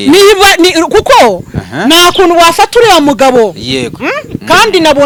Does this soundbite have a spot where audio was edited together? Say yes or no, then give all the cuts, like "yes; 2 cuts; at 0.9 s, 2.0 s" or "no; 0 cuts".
no; 0 cuts